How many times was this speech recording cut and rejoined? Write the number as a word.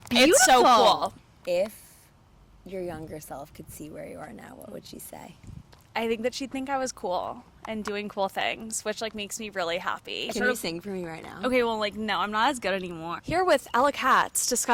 three